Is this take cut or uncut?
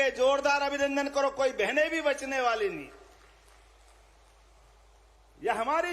uncut